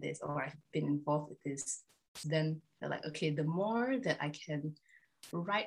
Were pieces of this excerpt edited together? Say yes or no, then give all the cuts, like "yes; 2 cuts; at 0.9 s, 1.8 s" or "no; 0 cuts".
no; 0 cuts